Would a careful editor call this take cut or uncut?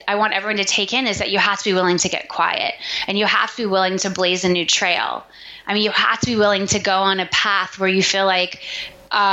uncut